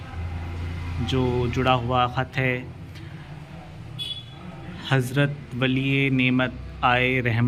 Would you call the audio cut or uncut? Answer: uncut